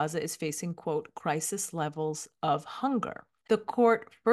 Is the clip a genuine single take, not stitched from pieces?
yes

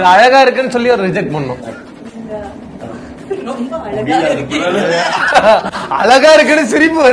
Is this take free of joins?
yes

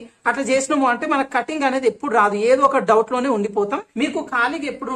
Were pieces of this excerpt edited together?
yes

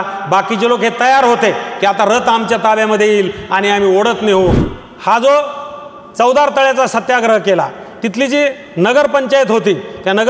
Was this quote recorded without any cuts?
no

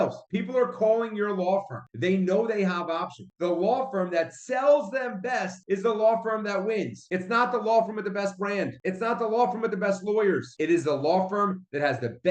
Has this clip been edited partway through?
yes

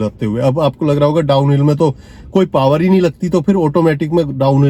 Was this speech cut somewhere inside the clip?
no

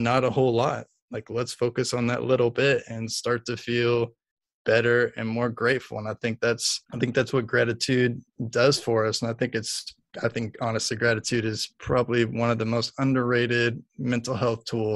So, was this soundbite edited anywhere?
yes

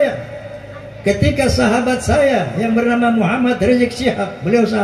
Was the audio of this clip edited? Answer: no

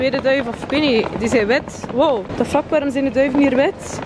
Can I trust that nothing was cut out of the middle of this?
no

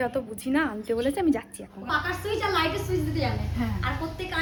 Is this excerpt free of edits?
yes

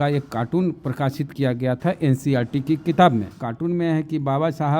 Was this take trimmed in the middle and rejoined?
yes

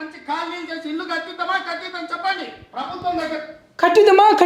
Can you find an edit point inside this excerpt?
no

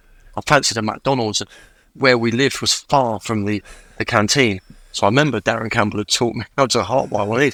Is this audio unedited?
yes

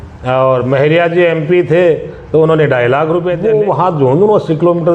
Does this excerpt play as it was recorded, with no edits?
no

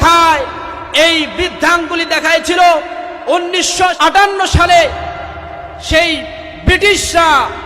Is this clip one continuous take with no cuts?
no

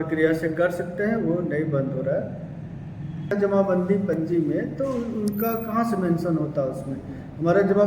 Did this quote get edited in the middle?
yes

